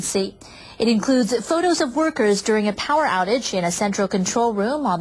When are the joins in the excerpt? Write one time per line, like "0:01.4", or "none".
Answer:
0:01.8